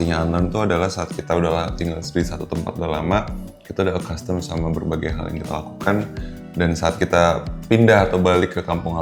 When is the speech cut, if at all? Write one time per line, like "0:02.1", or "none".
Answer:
none